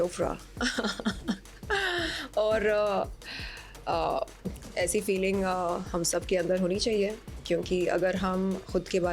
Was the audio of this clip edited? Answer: no; 0 cuts

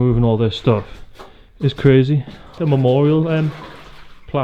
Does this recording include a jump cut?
yes; 1 cut; at 2.6 s

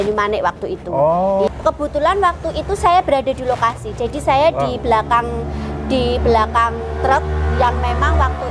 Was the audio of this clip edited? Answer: yes; 1 cut; at 1.5 s

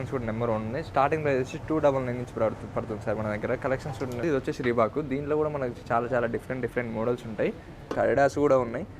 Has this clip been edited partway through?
yes; 2 cuts; at 4.2 s, 7.9 s

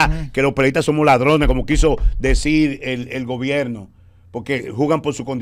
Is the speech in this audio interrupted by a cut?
no; 0 cuts

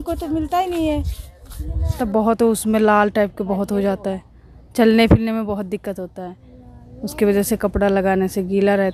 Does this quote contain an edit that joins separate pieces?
yes; 1 cut; at 2.0 s

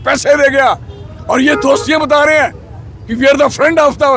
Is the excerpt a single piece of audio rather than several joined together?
yes; 0 cuts

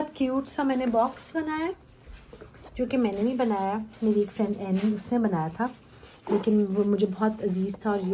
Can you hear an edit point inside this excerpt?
no; 0 cuts

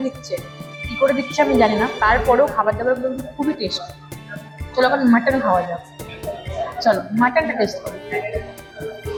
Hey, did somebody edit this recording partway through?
no; 0 cuts

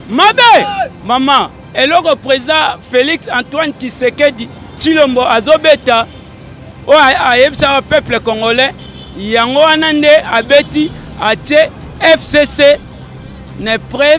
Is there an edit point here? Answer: yes; 1 cut; at 0.9 s

